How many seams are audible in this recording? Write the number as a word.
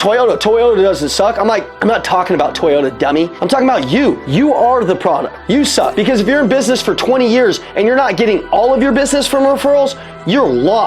four